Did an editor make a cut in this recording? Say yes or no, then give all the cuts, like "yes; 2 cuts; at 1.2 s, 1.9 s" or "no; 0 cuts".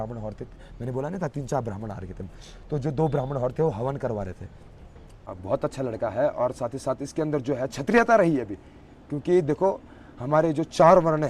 yes; 1 cut; at 5.3 s